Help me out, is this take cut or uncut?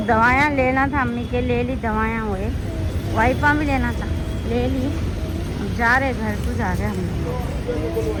uncut